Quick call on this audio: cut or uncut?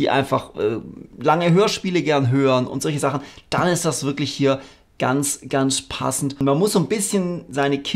cut